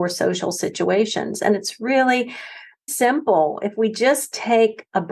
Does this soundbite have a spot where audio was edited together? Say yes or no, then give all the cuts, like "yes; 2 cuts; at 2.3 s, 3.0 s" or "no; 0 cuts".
yes; 1 cut; at 2.8 s